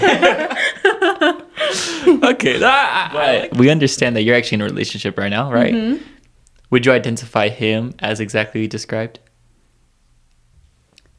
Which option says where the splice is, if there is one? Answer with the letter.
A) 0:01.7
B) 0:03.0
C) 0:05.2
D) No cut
B